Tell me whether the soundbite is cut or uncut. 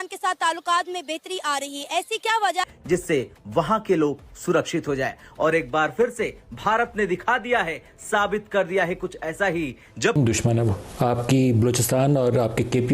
cut